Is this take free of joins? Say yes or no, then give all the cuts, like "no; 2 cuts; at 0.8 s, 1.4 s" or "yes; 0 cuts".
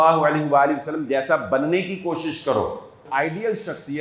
no; 1 cut; at 3.0 s